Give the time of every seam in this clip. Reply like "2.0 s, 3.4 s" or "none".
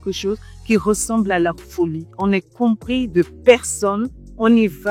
2.1 s